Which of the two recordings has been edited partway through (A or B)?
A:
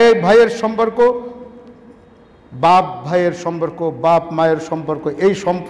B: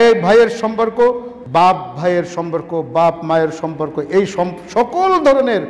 B